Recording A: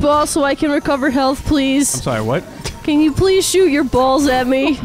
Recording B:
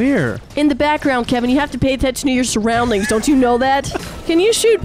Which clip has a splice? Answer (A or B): B